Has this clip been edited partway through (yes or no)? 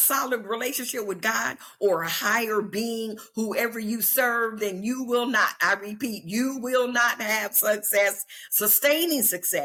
no